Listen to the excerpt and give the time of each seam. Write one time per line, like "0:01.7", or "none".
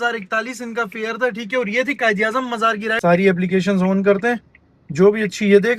0:02.9